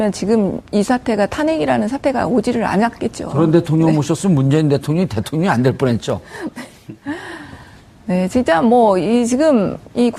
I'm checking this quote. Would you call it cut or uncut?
cut